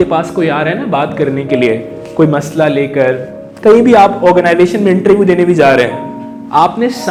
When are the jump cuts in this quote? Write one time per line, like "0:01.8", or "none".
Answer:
none